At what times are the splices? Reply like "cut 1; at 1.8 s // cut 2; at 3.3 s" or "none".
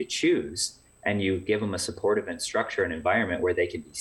none